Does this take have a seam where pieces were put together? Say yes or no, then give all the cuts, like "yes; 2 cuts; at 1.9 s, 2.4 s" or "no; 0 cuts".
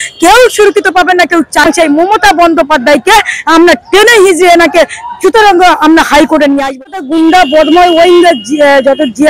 yes; 2 cuts; at 1.6 s, 7.0 s